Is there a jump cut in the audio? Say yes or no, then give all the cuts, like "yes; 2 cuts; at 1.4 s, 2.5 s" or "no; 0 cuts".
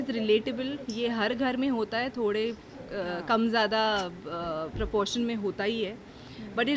no; 0 cuts